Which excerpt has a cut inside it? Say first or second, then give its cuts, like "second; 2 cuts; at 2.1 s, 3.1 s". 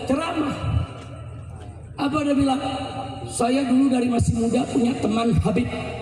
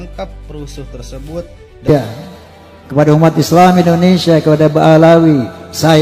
second; 1 cut; at 1.9 s